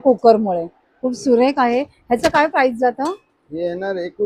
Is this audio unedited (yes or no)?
yes